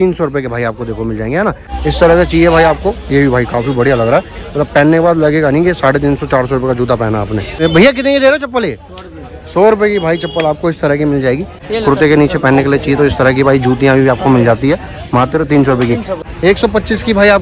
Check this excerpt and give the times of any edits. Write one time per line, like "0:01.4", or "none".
0:01.7
0:07.6
0:11.6
0:16.1